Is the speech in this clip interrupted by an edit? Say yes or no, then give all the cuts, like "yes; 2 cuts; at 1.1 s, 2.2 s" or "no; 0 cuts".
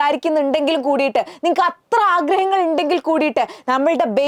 no; 0 cuts